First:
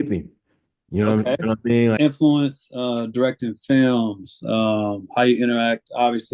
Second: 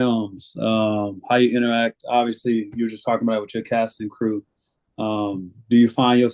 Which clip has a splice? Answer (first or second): first